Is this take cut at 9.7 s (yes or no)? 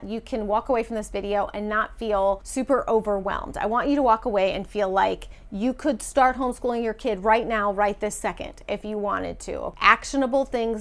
yes